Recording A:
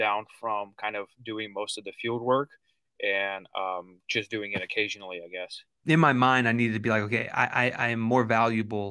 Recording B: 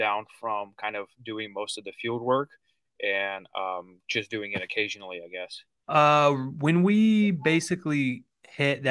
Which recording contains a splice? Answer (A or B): A